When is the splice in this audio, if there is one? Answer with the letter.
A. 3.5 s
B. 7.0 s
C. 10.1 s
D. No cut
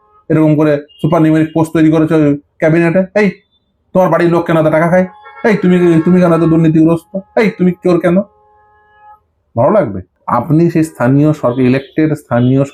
C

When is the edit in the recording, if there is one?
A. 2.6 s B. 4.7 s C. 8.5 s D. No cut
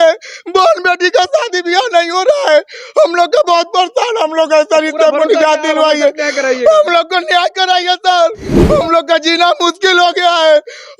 C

